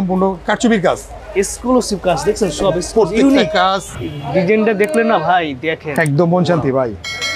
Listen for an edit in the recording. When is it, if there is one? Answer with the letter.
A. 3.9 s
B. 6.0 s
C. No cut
A